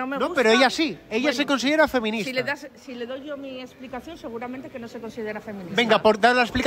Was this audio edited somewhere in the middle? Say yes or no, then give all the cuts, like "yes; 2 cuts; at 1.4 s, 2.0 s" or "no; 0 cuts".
no; 0 cuts